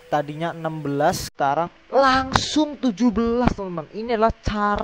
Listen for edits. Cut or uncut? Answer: cut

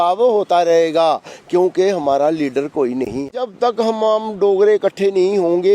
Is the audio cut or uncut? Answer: cut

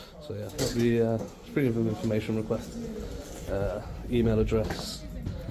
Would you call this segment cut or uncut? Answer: uncut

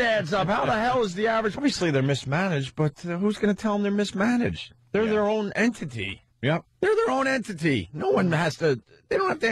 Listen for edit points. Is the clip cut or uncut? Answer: uncut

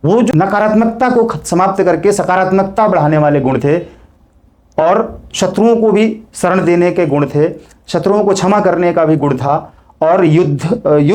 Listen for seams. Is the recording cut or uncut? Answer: uncut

